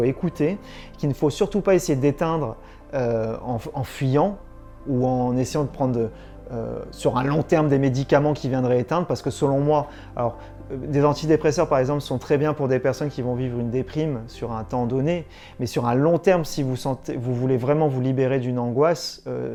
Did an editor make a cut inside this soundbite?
no; 0 cuts

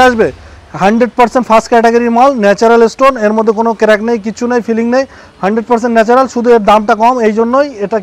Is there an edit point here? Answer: no; 0 cuts

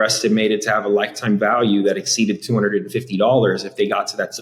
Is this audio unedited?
yes; 0 cuts

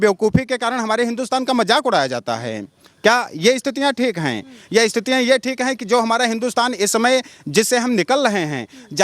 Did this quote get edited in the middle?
no; 0 cuts

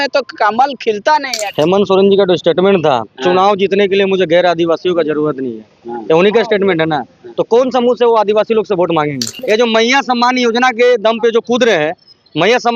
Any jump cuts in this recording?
yes; 2 cuts; at 1.5 s, 9.3 s

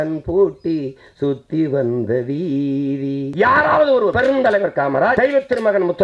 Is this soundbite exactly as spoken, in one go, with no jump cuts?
no; 3 cuts; at 3.3 s, 4.1 s, 5.2 s

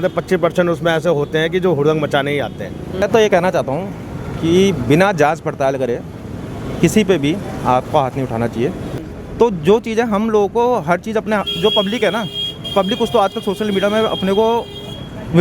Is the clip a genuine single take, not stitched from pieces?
no; 2 cuts; at 3.0 s, 8.9 s

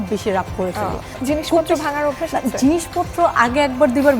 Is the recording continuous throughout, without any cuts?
no; 1 cut; at 1.2 s

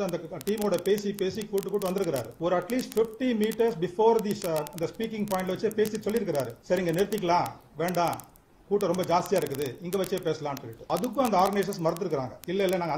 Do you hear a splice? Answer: yes; 3 cuts; at 2.3 s, 6.6 s, 10.7 s

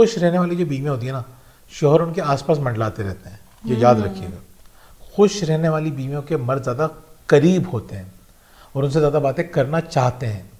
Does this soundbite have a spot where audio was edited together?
no; 0 cuts

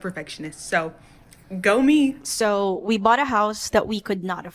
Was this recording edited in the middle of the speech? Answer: yes; 1 cut; at 2.2 s

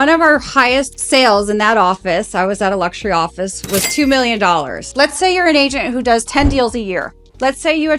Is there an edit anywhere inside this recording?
yes; 2 cuts; at 1.0 s, 4.8 s

